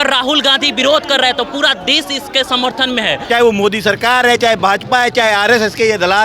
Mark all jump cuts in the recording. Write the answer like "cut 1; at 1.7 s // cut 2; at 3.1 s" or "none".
cut 1; at 3.2 s